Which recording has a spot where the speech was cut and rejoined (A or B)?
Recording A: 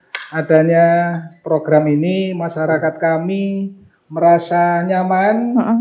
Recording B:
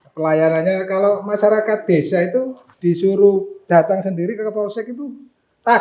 B